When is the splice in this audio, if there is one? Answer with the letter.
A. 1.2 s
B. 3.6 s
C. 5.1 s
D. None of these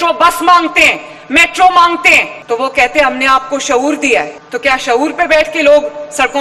D